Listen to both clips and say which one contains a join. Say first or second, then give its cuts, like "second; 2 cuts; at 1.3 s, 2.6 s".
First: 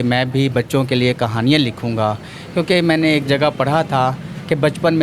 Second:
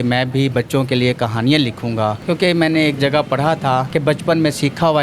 second; 2 cuts; at 2.2 s, 3.9 s